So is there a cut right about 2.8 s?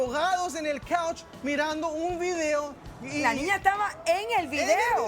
yes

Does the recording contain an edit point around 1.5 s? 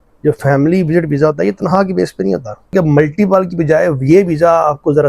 no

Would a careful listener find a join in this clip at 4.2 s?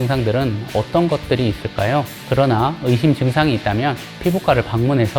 no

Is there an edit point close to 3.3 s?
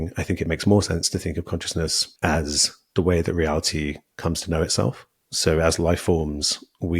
no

